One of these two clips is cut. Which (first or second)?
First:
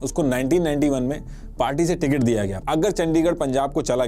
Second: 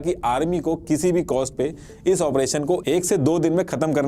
first